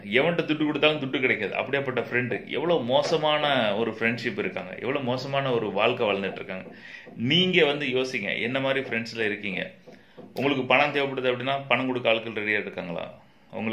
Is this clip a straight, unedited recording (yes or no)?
yes